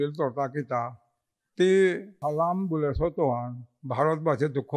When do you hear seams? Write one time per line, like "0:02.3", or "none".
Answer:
0:02.1